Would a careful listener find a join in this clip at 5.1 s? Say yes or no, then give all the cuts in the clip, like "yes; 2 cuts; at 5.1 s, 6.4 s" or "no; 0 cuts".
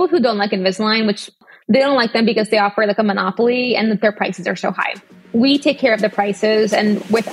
no; 1 cut; at 1.5 s